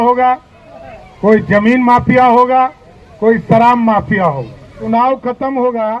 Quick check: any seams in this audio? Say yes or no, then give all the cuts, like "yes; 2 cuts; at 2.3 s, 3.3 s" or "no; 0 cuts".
yes; 1 cut; at 4.8 s